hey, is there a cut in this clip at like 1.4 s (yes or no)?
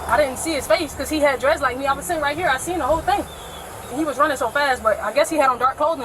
no